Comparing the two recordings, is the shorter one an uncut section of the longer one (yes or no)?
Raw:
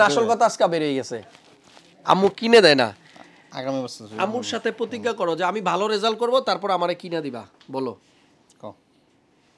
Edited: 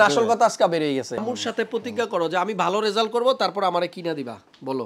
no